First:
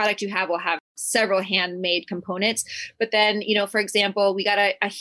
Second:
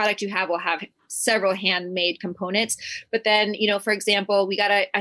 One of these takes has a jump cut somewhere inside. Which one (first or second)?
first